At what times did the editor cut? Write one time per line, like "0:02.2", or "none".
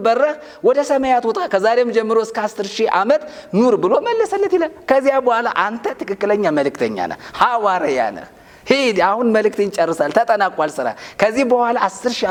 none